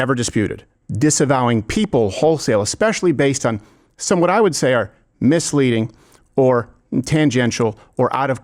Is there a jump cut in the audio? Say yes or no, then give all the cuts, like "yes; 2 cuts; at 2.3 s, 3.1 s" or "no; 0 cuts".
no; 0 cuts